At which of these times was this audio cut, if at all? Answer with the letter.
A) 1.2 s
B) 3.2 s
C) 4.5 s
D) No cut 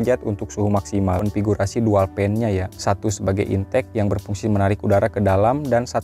A